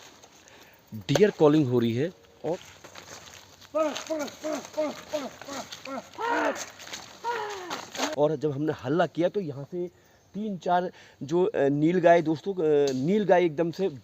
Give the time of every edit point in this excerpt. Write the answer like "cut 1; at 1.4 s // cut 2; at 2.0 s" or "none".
cut 1; at 2.5 s // cut 2; at 8.1 s